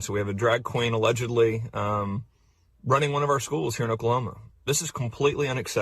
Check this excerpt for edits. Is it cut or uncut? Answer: cut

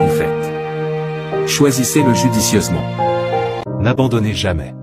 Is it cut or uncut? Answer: cut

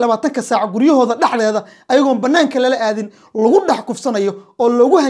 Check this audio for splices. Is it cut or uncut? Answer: uncut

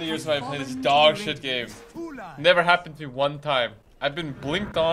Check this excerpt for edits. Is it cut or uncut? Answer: cut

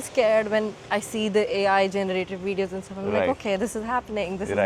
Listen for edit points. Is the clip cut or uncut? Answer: uncut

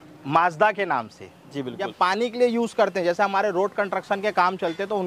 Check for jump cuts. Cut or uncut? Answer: cut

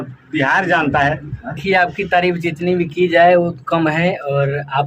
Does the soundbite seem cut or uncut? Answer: cut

